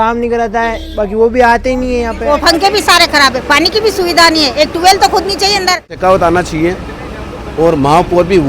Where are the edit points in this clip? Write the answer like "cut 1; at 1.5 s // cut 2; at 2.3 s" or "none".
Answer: cut 1; at 2.2 s // cut 2; at 5.9 s